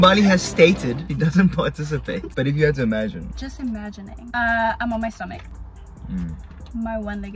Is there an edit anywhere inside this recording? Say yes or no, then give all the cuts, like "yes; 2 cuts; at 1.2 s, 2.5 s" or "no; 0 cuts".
yes; 2 cuts; at 1.1 s, 4.3 s